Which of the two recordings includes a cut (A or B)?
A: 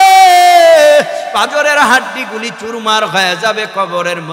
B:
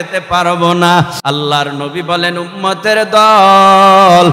B